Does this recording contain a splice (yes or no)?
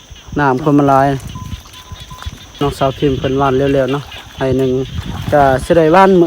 yes